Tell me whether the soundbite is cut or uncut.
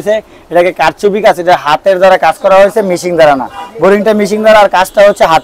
uncut